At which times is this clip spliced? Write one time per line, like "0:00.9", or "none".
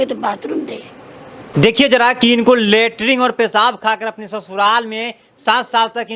0:01.5

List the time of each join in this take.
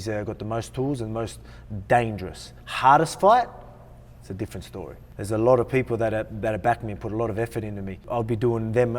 0:05.0
0:08.0

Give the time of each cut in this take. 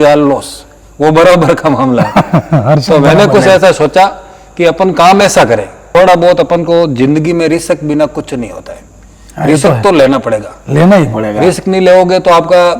0:05.8

